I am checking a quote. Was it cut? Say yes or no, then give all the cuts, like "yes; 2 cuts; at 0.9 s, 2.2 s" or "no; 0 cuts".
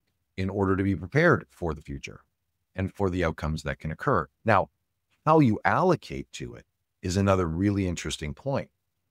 yes; 1 cut; at 4.3 s